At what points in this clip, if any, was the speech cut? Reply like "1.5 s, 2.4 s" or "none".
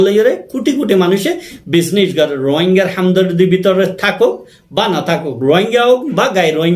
none